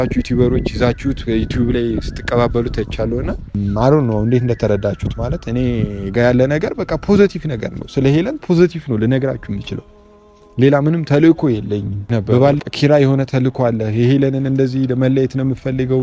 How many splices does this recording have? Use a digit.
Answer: 2